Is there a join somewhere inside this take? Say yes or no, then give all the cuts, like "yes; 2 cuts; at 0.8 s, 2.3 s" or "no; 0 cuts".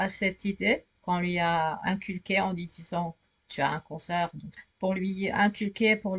yes; 1 cut; at 4.5 s